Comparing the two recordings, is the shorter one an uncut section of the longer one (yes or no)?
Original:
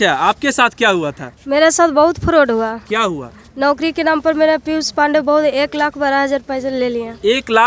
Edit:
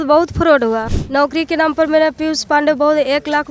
no